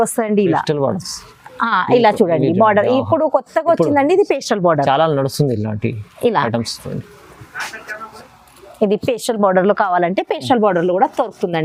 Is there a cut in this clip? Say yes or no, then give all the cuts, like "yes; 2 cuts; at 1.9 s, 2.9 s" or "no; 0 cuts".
no; 0 cuts